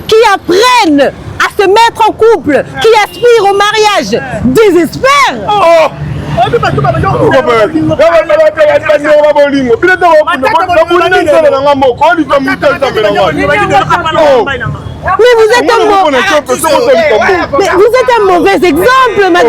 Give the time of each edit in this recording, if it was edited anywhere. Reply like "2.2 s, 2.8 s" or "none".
none